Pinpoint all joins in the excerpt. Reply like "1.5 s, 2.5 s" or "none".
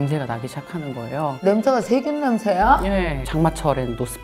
1.4 s, 3.3 s